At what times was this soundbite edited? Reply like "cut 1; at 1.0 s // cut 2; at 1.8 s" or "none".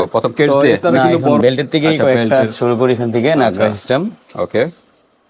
none